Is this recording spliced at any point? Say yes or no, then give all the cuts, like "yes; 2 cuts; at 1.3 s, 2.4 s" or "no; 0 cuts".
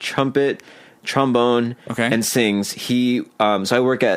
no; 0 cuts